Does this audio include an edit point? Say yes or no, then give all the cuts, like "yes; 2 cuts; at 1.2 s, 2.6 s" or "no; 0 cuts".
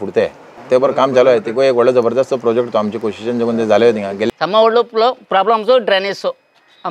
yes; 1 cut; at 4.3 s